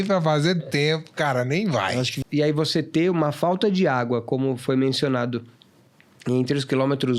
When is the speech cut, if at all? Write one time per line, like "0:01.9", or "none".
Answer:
0:02.2